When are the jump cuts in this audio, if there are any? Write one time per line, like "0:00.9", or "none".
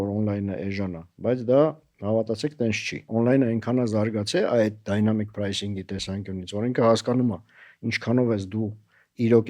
0:03.1